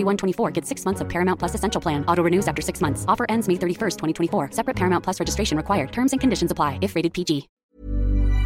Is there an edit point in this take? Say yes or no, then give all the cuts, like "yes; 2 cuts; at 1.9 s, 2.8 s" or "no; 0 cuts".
yes; 1 cut; at 7.5 s